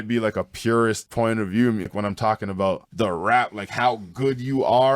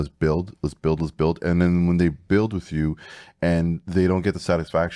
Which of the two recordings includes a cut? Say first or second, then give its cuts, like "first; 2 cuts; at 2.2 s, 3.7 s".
first; 3 cuts; at 1.1 s, 1.9 s, 2.9 s